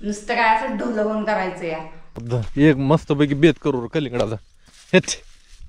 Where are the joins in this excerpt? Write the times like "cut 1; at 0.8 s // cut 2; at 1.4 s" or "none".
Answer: cut 1; at 2.3 s